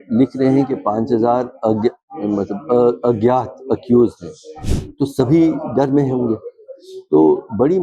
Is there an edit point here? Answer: no; 0 cuts

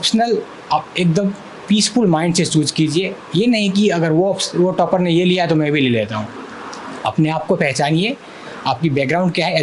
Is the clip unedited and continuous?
yes; 0 cuts

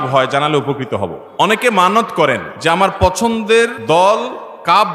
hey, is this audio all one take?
no; 3 cuts; at 1.6 s, 2.5 s, 3.8 s

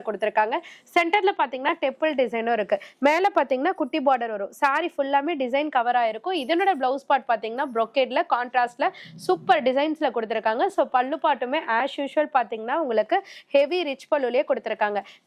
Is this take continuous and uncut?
yes; 0 cuts

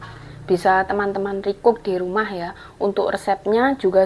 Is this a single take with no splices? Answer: yes; 0 cuts

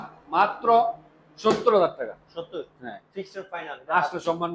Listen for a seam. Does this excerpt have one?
no; 0 cuts

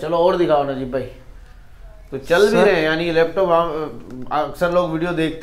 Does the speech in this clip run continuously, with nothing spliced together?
yes; 0 cuts

